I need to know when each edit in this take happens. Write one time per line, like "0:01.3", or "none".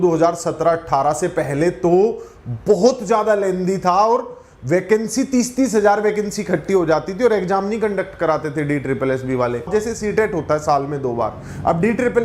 0:09.7